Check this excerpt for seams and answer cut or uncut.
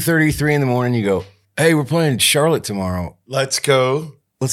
cut